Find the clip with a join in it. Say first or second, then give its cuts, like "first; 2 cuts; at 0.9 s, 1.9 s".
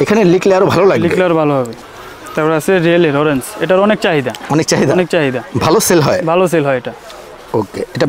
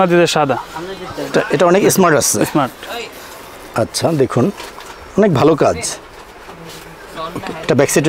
first; 1 cut; at 1.8 s